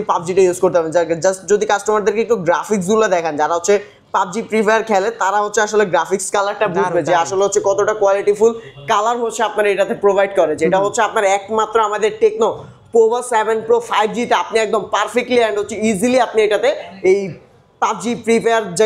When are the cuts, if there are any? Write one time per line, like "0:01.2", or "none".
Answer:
none